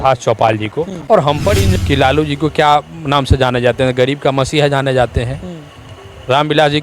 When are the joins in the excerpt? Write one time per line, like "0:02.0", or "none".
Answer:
0:01.6